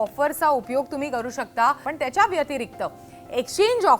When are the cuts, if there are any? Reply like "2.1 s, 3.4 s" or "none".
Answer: 1.9 s